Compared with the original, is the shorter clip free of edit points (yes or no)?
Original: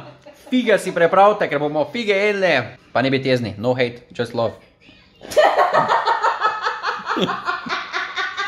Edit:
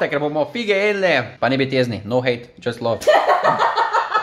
no